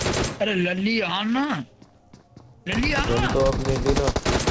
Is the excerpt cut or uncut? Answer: uncut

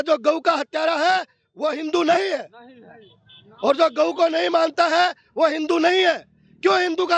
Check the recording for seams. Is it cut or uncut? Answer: uncut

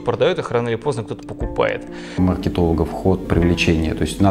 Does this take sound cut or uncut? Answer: cut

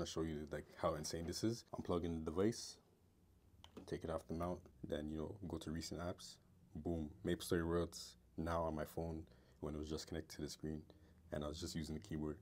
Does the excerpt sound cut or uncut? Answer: cut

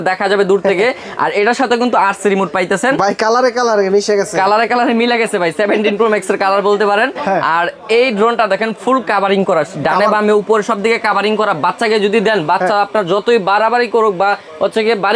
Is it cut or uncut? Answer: uncut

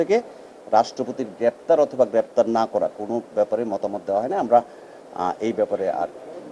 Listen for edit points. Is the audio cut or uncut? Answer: uncut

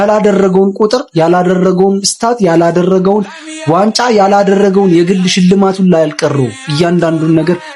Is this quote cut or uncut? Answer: uncut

